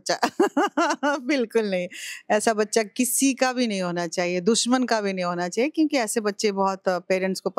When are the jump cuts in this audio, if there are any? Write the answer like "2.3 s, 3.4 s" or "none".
none